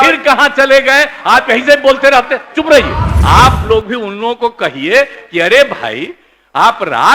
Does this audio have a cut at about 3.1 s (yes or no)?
yes